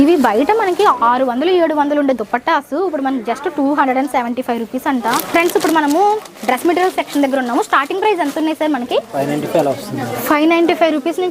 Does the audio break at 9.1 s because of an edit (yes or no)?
yes